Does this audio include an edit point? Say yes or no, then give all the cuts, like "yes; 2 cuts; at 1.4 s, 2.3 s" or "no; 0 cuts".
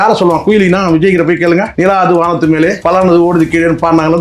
yes; 2 cuts; at 1.7 s, 2.8 s